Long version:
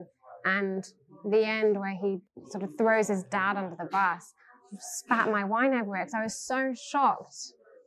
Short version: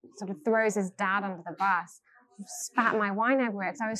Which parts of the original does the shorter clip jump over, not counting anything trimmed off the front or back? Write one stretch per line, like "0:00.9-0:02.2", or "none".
none